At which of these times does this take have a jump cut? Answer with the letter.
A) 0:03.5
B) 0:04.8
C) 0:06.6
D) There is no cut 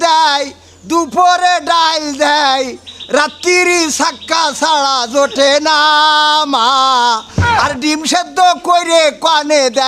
D